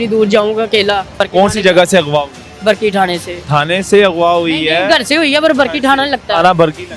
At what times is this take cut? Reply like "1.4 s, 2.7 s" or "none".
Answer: 1.2 s, 3.3 s